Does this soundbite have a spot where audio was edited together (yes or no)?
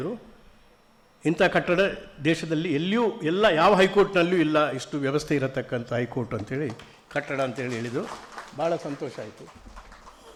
no